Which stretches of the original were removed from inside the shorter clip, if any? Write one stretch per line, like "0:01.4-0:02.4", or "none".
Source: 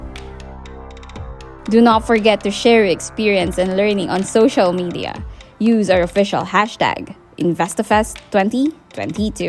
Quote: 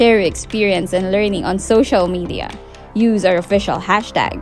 none